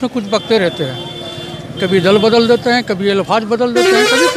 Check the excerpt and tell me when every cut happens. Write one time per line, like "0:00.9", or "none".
none